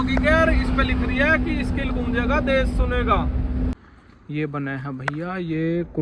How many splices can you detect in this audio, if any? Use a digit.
1